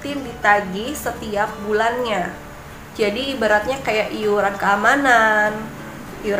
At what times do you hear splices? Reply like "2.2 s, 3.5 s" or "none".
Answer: none